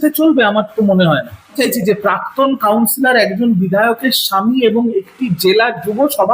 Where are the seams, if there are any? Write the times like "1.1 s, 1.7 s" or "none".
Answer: 1.6 s